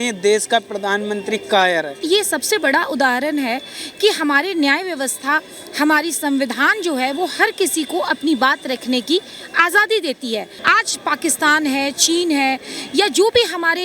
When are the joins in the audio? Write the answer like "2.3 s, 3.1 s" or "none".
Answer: 2.0 s, 10.5 s